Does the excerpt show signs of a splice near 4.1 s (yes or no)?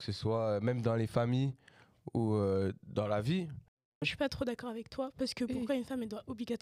yes